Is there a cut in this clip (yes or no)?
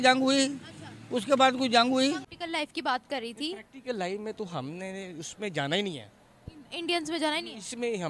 yes